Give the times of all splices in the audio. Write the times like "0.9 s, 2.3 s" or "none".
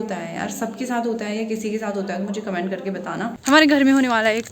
3.4 s